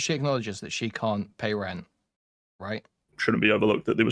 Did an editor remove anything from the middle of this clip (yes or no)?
yes